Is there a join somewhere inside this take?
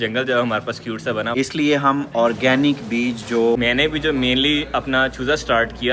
yes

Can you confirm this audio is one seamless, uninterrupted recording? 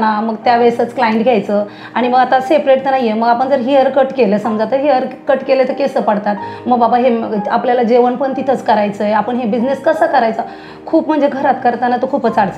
yes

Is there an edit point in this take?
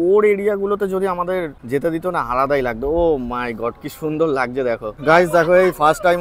yes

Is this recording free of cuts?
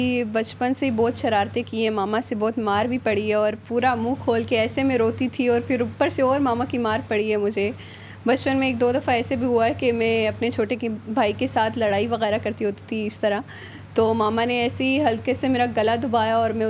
yes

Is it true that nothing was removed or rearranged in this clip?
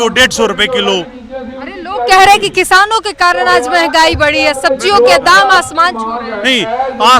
yes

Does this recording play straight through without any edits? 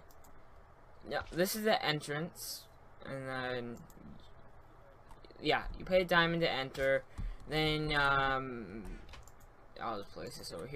yes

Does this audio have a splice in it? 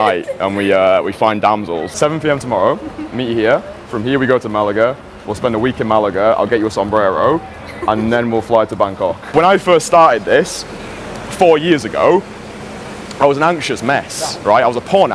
yes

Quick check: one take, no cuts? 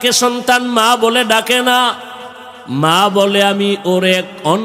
yes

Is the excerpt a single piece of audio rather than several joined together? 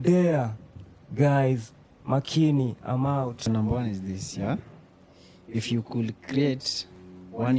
no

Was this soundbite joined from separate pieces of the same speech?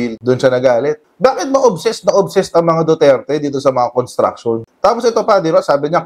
no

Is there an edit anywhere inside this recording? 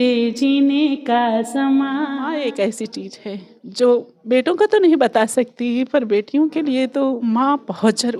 yes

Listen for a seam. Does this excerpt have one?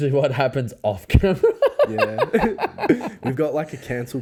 no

